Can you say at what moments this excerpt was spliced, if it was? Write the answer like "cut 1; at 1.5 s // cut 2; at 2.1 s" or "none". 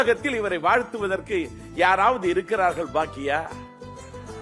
none